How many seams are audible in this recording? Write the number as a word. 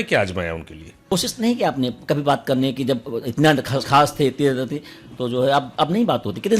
one